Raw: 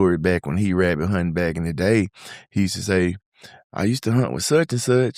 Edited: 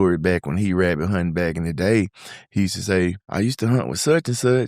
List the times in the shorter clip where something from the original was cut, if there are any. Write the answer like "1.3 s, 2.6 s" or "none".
3.2 s